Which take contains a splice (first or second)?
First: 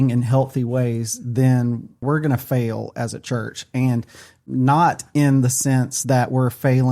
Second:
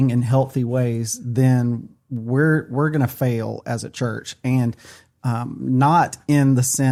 first